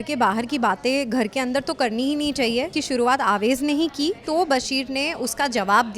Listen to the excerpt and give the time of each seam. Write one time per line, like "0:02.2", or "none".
0:02.8
0:04.2